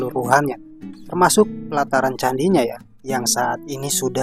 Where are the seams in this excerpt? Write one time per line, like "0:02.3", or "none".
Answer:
none

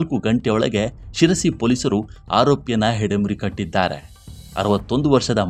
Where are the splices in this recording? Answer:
none

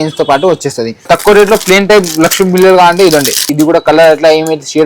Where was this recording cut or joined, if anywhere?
0:01.1
0:03.5

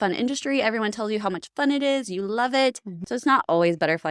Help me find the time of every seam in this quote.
0:03.0

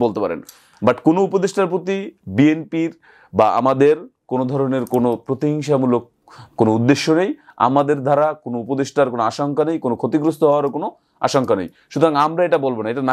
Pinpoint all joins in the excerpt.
none

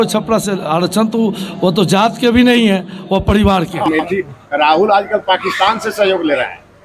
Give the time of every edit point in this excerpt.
0:03.9

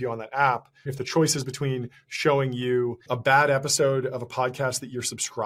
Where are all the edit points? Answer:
0:00.9
0:03.0

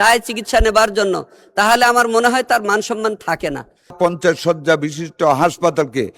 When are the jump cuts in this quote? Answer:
0:04.0

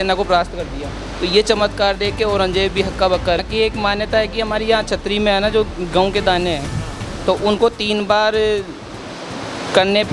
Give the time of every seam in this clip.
0:03.4

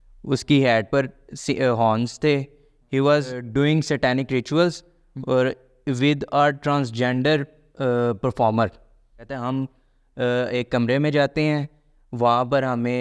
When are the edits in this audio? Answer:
0:03.4
0:09.4

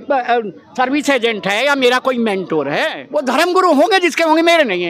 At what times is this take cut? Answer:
0:03.0

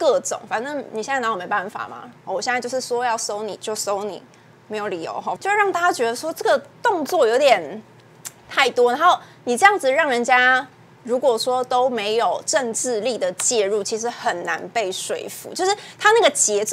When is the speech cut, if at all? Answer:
0:05.4

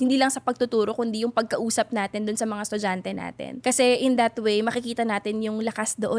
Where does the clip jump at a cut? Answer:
0:03.5

